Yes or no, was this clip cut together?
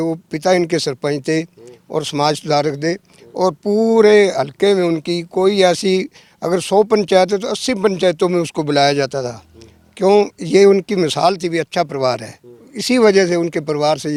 no